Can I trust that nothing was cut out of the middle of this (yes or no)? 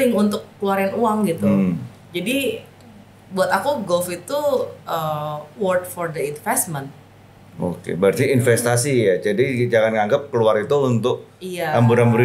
yes